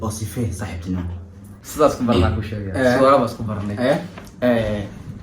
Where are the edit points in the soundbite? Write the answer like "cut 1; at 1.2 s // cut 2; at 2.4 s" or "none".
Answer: cut 1; at 1.6 s